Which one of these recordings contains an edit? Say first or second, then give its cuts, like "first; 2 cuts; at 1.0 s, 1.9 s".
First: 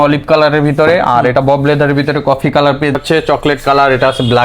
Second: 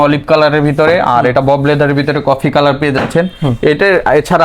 first; 1 cut; at 3.0 s